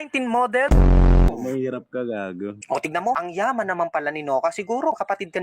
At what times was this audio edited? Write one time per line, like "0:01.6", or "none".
0:01.3